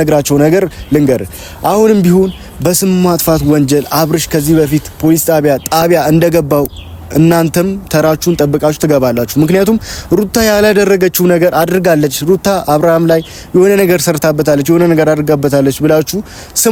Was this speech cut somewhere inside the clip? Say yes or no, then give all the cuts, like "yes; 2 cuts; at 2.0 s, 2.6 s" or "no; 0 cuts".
no; 0 cuts